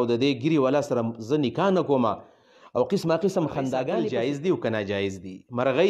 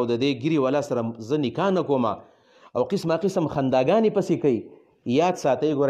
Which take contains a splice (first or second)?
first